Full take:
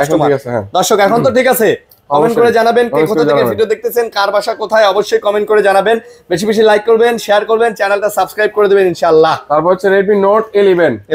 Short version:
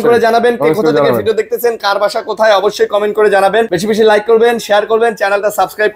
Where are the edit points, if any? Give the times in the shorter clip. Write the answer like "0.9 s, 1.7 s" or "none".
3.7 s